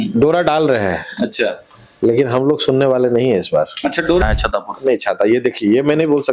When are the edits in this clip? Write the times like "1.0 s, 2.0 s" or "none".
4.2 s

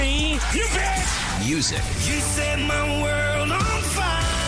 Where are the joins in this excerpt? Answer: none

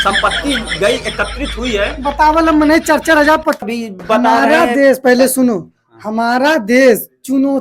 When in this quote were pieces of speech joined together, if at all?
3.6 s

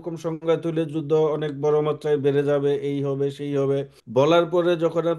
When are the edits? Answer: 4.0 s

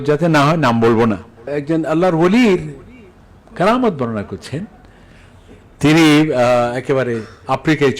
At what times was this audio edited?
1.5 s

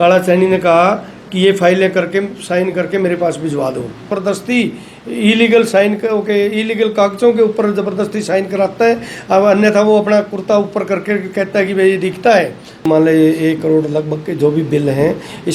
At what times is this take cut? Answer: 4.1 s, 12.9 s

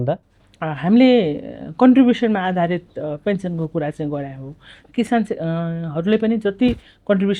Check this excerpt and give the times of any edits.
none

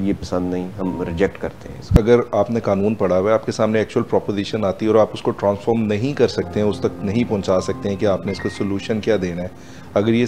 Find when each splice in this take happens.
1.9 s

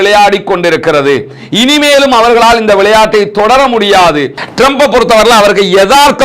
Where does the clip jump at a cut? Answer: 4.4 s

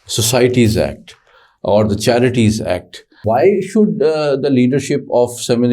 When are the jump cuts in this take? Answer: 3.2 s

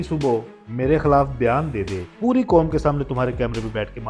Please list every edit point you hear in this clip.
2.1 s

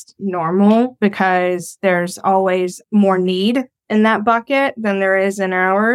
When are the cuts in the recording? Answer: none

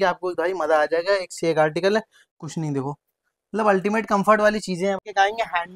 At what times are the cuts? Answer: 2.2 s, 5.0 s

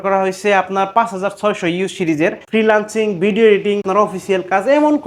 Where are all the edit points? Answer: 2.4 s, 3.8 s

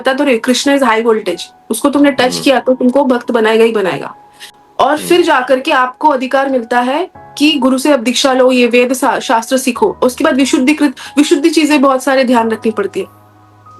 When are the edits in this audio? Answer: 4.4 s

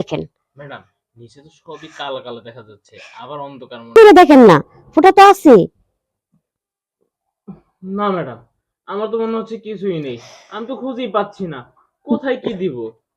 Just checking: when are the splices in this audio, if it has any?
3.9 s

